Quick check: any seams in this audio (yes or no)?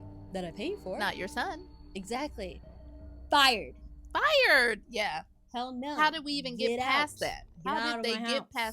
yes